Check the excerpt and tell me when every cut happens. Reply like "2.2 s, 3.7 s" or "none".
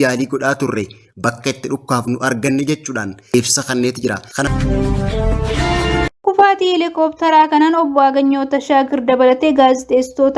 3.3 s, 4.5 s, 6.1 s